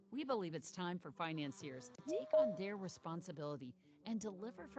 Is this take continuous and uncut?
no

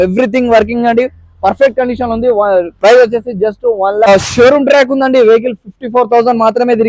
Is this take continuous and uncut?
no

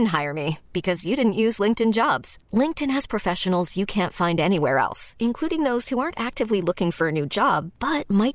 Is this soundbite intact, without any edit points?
yes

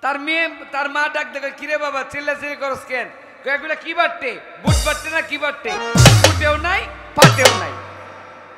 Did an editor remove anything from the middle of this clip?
no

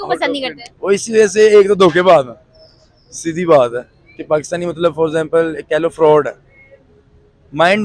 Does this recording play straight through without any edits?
yes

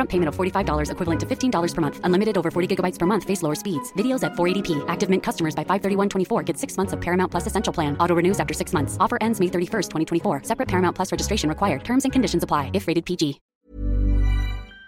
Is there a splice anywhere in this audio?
yes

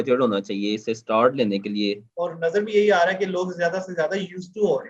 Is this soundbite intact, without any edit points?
no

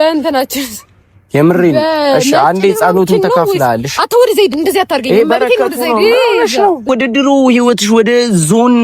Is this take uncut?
no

